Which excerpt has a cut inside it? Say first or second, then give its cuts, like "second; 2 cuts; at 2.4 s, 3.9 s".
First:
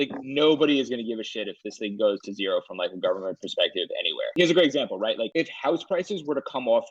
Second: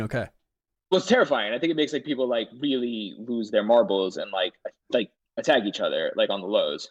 first; 2 cuts; at 4.2 s, 5.3 s